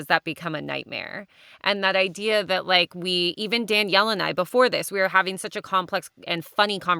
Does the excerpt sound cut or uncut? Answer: uncut